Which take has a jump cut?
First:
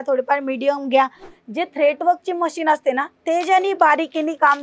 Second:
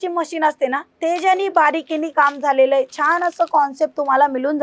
first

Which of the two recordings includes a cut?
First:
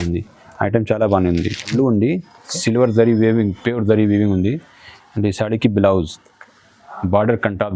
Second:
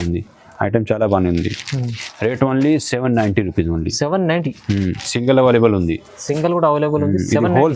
first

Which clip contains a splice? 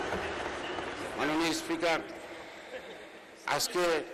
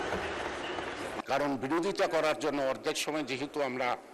second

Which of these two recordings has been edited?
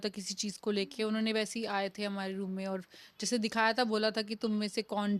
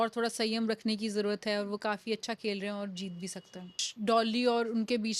second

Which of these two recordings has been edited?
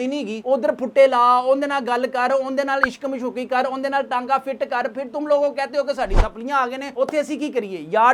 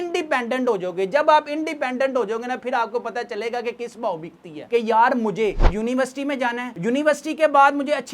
second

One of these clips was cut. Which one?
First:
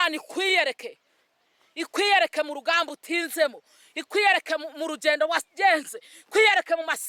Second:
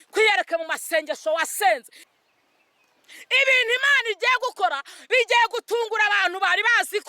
second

